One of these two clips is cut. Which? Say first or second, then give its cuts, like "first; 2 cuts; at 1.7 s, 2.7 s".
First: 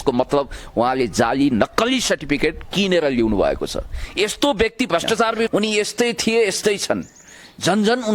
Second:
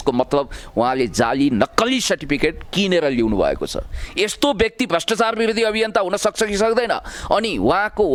first; 1 cut; at 5.5 s